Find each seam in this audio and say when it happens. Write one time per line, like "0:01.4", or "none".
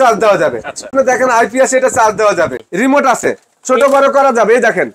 0:00.9
0:02.6